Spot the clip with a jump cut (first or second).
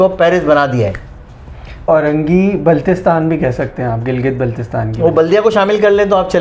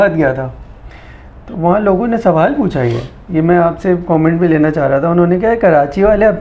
first